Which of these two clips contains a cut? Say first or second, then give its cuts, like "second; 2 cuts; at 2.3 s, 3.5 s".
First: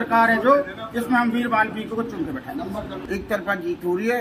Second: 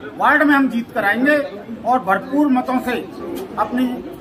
first; 1 cut; at 3.0 s